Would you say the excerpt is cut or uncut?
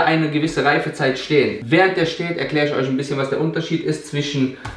cut